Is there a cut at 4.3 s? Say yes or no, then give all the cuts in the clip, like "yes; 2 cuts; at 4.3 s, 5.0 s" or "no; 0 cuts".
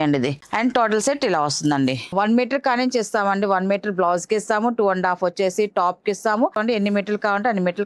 no; 2 cuts; at 2.1 s, 6.6 s